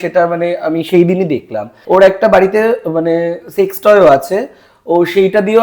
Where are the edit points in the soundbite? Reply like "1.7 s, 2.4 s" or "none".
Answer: 1.7 s